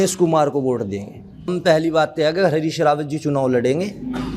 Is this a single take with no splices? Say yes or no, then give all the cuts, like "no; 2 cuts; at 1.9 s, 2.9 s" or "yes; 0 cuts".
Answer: no; 1 cut; at 1.5 s